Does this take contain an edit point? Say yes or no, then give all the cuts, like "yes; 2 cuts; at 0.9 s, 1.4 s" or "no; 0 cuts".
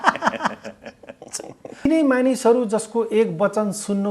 yes; 1 cut; at 1.8 s